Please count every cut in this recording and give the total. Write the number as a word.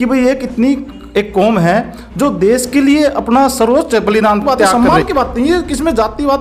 one